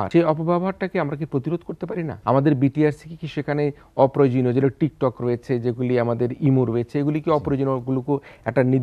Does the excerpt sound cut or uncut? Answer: cut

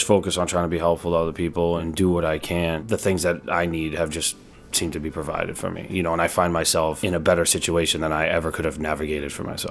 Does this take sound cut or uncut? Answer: cut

